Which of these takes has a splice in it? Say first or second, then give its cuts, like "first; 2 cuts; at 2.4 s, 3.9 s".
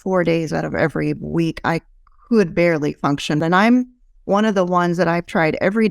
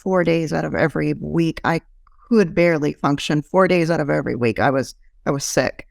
first; 1 cut; at 3.4 s